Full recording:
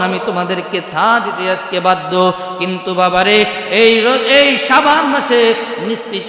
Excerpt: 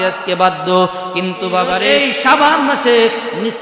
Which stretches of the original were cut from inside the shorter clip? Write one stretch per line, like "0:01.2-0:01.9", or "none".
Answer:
0:03.3-0:04.3